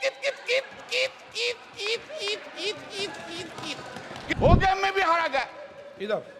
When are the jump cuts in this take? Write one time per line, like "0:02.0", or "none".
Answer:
0:04.3